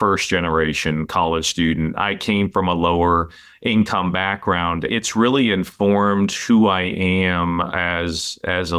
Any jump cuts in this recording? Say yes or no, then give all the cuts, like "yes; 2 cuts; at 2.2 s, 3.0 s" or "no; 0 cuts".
yes; 1 cut; at 4.9 s